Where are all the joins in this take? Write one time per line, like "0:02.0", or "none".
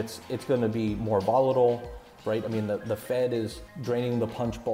0:02.1
0:03.7

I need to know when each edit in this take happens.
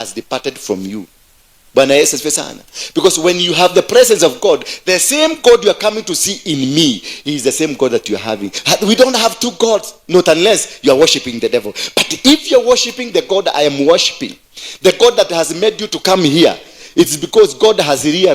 0:08.5

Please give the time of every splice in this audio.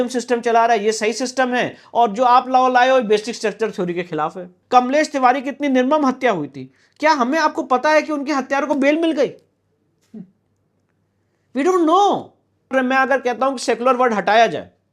0:04.5
0:12.7

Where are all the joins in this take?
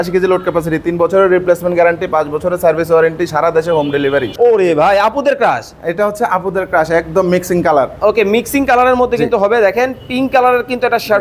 0:04.3

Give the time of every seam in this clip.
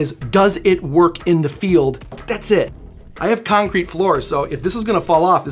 0:02.1
0:02.8

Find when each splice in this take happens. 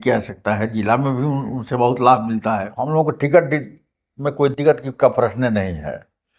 0:02.9

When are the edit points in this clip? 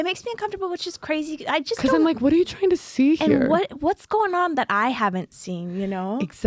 none

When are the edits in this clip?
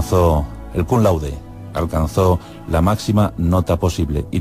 0:01.1

